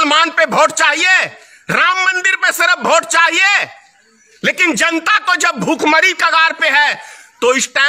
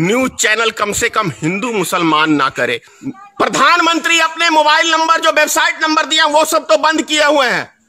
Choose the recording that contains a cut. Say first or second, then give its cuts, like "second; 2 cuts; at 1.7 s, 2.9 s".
second; 1 cut; at 2.9 s